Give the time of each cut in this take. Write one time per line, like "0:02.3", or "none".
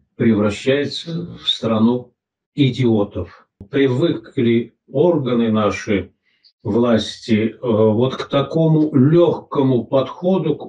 0:03.7

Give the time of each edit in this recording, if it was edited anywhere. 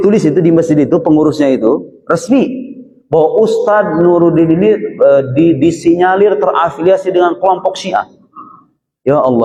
none

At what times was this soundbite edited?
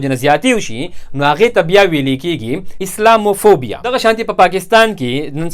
0:03.8

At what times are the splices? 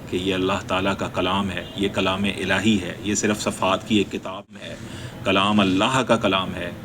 0:04.5

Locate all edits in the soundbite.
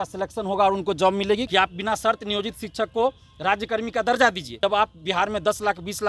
0:01.5
0:04.5

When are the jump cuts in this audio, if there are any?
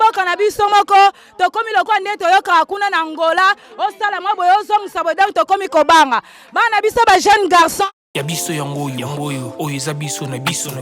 0:07.8

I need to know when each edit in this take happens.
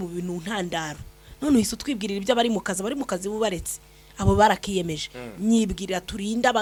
none

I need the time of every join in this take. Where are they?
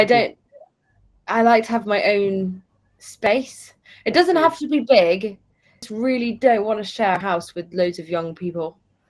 0:05.9

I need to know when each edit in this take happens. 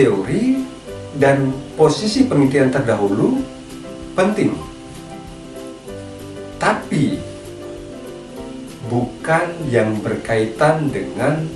0:04.6
0:06.6
0:07.3
0:08.9

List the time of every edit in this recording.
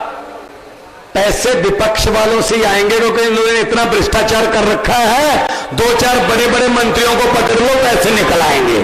none

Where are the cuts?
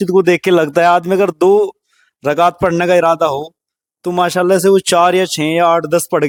none

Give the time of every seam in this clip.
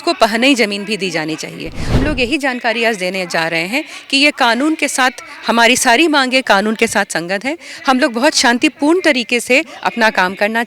0:02.0

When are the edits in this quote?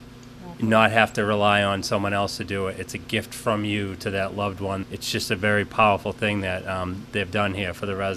0:04.8

